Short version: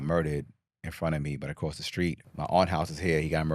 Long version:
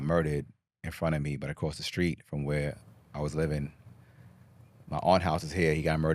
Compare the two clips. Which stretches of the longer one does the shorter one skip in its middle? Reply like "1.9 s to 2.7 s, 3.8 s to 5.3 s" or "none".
2.2 s to 4.8 s